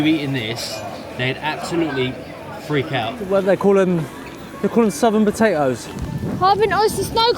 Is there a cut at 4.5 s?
no; 1 cut; at 3.2 s

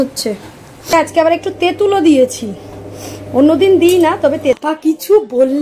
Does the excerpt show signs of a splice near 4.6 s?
yes; 2 cuts; at 0.9 s, 4.6 s

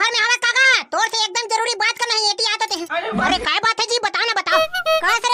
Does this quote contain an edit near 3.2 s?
yes; 1 cut; at 3.2 s

